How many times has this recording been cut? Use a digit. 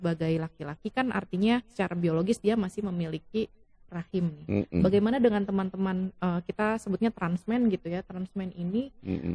0